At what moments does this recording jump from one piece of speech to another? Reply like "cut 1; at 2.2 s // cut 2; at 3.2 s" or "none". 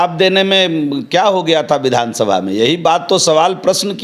none